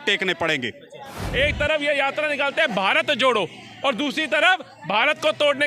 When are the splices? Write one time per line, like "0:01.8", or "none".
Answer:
0:01.2